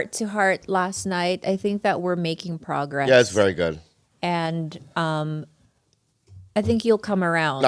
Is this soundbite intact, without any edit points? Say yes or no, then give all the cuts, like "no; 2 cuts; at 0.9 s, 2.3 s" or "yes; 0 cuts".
yes; 0 cuts